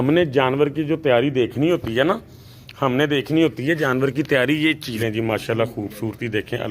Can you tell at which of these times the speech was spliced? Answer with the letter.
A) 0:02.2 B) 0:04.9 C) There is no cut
B